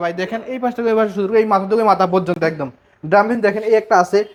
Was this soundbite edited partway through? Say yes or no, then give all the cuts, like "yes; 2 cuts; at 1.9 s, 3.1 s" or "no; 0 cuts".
no; 0 cuts